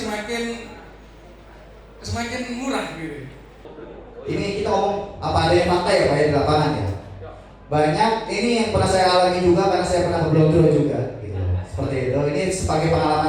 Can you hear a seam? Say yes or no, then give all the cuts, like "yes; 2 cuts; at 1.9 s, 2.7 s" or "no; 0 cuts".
yes; 1 cut; at 3.6 s